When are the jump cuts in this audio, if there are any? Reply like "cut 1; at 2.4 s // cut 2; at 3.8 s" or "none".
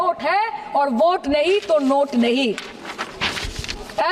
none